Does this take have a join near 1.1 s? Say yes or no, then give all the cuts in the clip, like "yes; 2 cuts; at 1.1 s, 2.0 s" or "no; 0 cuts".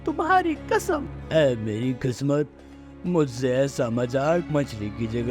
yes; 1 cut; at 1.1 s